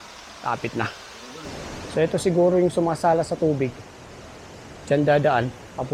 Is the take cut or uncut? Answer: cut